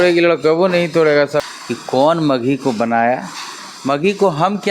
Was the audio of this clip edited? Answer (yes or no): yes